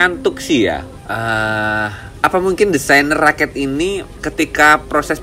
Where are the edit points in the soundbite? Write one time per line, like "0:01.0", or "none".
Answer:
0:01.0
0:02.0